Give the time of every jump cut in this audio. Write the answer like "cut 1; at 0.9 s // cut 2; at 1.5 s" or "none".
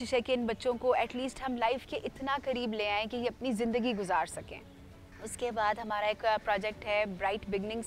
none